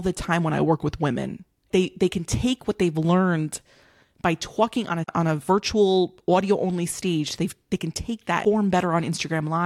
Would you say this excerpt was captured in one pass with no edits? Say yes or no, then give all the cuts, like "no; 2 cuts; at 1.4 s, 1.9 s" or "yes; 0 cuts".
no; 3 cuts; at 1.7 s, 5.1 s, 8.4 s